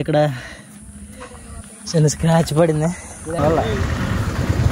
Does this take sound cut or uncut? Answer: cut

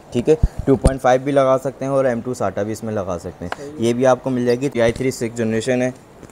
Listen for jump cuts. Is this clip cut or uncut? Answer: cut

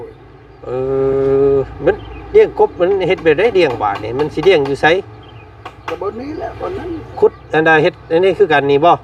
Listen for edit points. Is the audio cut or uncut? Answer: uncut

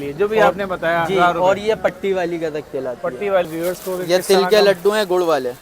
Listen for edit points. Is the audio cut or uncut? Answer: cut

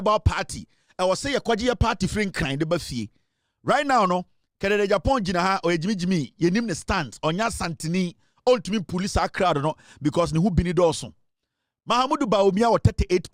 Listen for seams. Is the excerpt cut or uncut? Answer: uncut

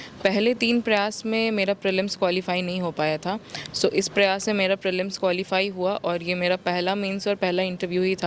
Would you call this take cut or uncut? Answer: uncut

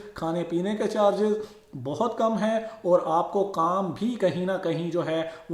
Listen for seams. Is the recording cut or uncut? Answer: uncut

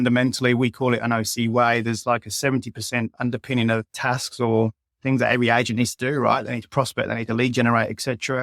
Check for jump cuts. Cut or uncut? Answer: cut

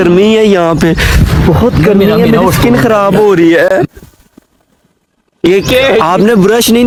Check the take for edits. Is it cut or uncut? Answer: uncut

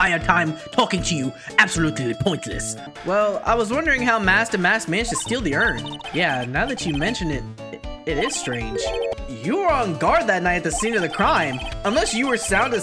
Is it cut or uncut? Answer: cut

